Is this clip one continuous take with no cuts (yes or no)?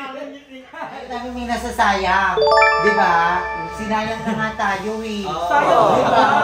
no